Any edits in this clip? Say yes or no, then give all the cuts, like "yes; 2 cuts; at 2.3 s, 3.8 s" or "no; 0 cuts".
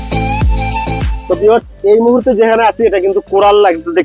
yes; 1 cut; at 1.2 s